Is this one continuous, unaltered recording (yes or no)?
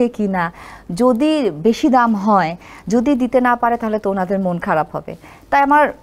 yes